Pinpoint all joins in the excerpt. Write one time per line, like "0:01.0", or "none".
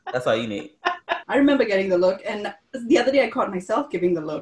0:01.1